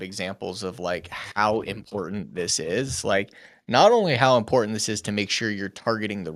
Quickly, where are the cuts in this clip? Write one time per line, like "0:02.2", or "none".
none